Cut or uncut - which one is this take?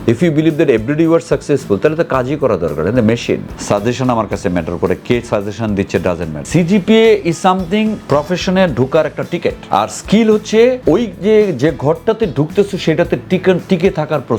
cut